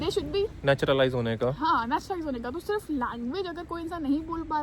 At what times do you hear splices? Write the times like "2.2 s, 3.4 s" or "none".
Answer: none